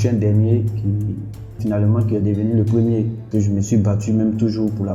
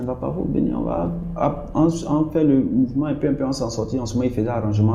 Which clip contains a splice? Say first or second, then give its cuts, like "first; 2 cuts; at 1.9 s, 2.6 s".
first; 2 cuts; at 1.6 s, 3.2 s